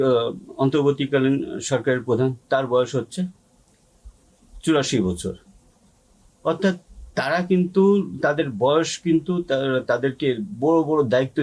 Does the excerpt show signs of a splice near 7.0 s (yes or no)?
no